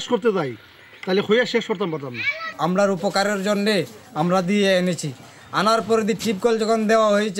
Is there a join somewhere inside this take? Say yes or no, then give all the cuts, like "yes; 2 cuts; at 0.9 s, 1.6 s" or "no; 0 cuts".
yes; 1 cut; at 2.5 s